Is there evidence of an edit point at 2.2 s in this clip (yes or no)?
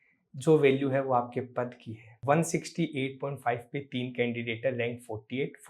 yes